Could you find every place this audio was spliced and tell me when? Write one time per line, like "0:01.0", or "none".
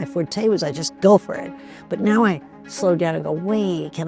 none